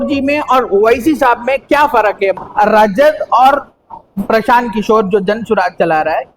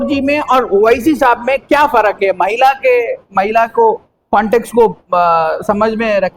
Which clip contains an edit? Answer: first; 1 cut; at 2.4 s

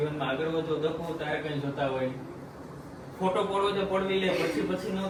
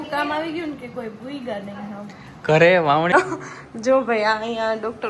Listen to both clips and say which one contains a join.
second; 1 cut; at 3.1 s

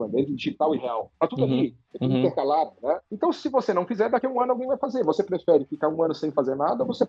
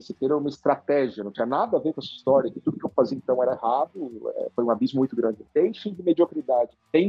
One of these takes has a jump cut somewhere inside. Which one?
second; 1 cut; at 5.4 s

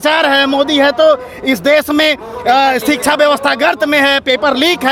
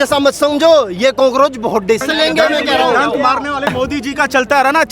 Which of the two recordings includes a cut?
second; 2 cuts; at 2.1 s, 3.7 s

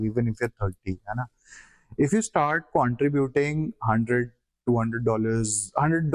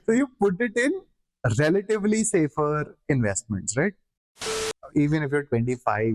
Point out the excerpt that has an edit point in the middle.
second; 1 cut; at 4.5 s

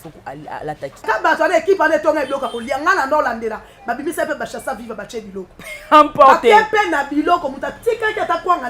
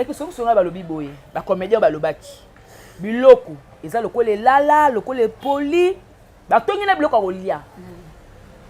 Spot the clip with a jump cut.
first; 1 cut; at 1.1 s

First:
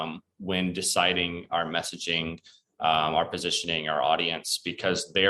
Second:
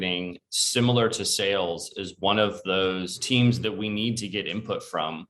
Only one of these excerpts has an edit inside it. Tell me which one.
second; 1 cut; at 3.1 s

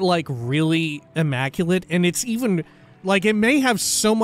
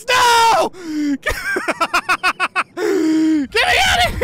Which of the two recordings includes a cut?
first; 2 cuts; at 1.0 s, 3.0 s

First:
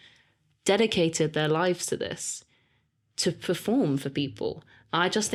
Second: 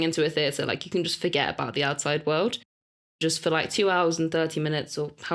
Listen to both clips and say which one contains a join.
second; 1 cut; at 3.1 s

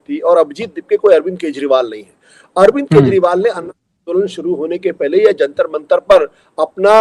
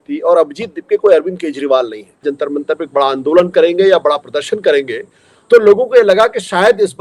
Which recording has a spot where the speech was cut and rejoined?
second; 1 cut; at 2.3 s

